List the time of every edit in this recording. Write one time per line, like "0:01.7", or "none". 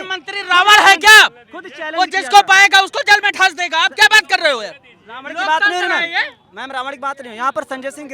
none